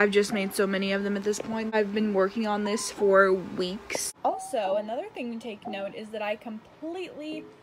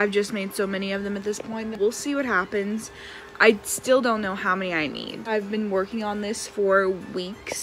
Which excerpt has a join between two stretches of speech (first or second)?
first